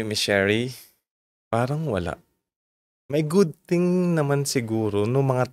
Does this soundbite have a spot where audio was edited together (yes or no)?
no